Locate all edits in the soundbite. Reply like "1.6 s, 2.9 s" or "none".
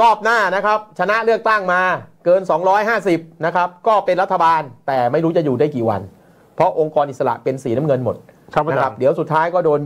none